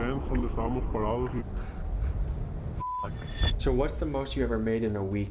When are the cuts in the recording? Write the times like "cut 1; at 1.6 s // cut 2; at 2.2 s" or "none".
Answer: cut 1; at 1.4 s // cut 2; at 3.5 s